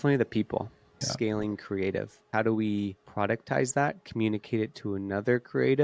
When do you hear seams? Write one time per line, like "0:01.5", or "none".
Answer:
0:01.0
0:02.3
0:03.0